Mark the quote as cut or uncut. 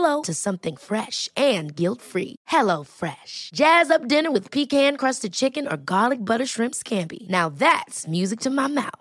uncut